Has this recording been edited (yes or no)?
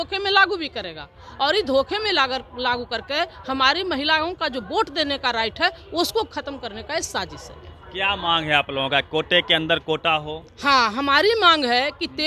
no